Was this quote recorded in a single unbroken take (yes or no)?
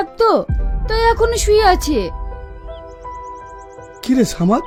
yes